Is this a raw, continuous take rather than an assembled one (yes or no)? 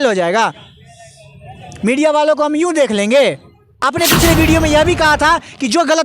no